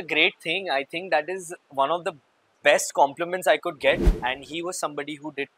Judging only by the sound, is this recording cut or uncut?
cut